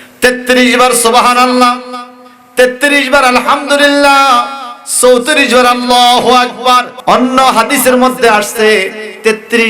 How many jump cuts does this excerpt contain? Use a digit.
1